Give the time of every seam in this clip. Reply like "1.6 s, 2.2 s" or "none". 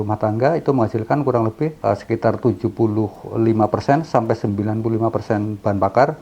1.8 s